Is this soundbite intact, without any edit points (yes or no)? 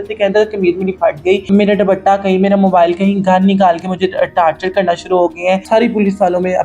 no